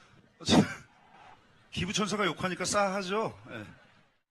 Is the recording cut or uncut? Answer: uncut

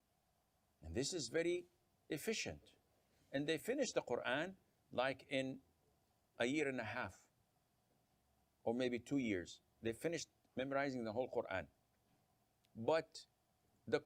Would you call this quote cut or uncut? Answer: uncut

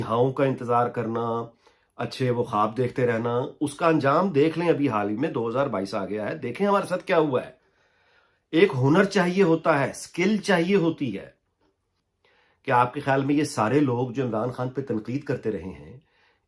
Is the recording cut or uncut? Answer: uncut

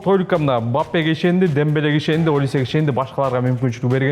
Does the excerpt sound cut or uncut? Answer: uncut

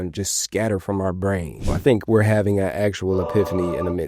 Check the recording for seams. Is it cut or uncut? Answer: cut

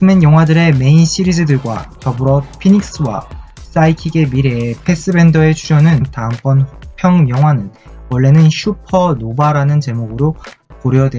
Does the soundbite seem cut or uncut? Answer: uncut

